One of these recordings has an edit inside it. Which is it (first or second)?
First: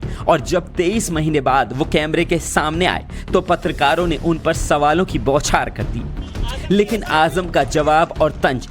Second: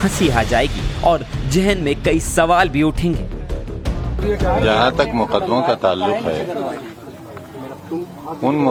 first